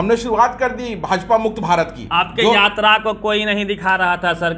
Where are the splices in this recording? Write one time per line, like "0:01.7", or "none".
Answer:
0:02.0